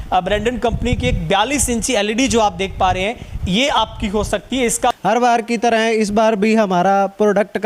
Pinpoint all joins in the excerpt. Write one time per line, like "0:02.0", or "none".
0:05.0